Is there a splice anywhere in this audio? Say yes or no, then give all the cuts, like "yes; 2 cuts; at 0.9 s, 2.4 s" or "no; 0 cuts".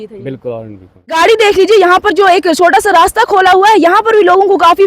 yes; 1 cut; at 1.1 s